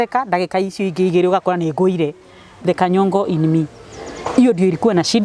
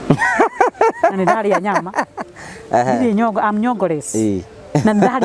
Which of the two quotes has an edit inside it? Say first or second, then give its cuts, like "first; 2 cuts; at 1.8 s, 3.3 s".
first; 1 cut; at 2.5 s